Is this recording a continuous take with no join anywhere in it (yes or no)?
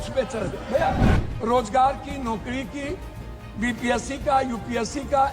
no